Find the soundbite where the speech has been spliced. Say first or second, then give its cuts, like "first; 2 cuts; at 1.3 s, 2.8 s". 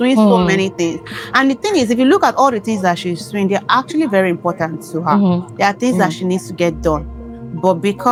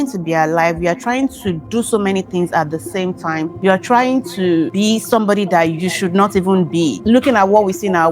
second; 3 cuts; at 3.5 s, 4.7 s, 7.0 s